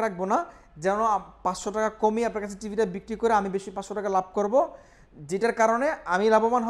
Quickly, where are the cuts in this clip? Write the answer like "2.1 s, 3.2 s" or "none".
none